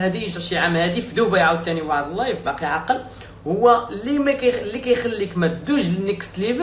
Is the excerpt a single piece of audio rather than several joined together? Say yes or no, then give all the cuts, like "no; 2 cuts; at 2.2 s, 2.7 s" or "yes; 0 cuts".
yes; 0 cuts